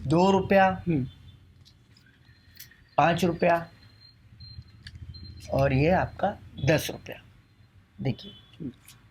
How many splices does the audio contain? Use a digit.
0